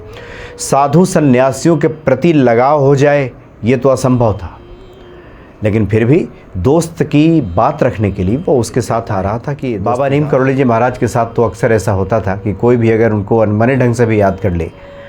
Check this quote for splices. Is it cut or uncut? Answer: cut